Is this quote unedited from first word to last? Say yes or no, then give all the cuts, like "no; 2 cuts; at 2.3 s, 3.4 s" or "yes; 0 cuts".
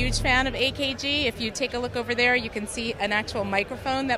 yes; 0 cuts